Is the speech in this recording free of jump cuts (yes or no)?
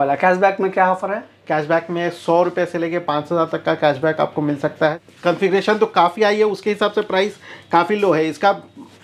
no